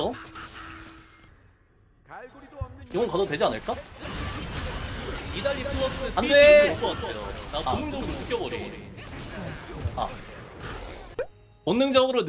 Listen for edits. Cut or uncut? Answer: cut